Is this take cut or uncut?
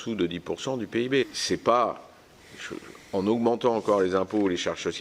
cut